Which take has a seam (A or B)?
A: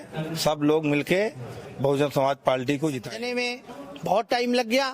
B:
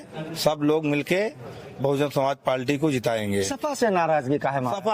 A